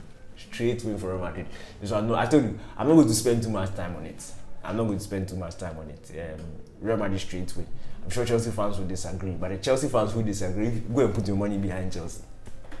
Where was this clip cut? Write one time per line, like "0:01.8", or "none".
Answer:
none